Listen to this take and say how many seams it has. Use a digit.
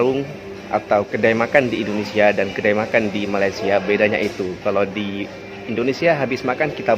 1